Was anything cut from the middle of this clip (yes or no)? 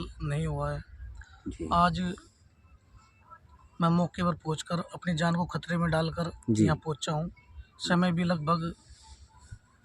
no